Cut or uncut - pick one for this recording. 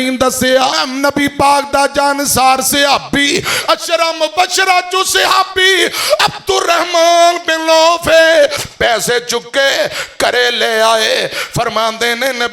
cut